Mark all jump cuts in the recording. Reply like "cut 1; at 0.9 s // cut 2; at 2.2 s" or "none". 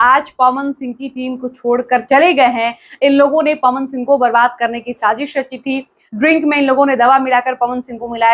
none